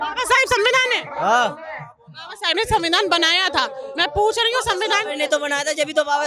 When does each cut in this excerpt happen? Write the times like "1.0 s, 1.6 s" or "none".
none